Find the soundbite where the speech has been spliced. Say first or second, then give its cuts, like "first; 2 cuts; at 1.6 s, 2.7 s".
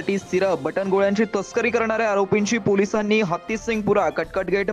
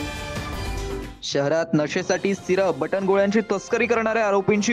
second; 1 cut; at 1.0 s